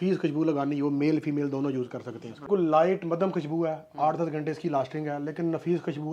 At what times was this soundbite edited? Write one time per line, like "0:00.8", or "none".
0:02.5